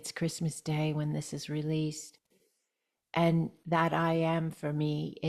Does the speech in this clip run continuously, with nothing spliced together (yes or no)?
yes